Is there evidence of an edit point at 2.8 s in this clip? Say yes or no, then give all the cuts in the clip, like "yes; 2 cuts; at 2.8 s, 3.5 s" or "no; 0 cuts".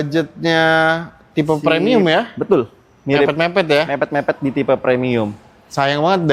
no; 0 cuts